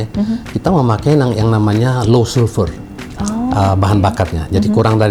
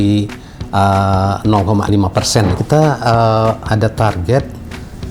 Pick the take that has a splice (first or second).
second